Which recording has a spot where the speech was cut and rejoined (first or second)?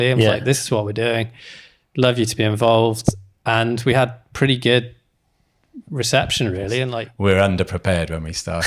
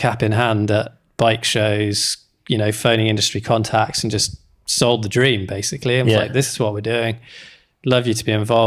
first